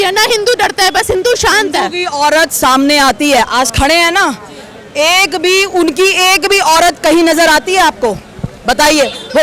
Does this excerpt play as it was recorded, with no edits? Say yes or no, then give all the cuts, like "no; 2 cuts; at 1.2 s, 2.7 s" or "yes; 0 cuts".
yes; 0 cuts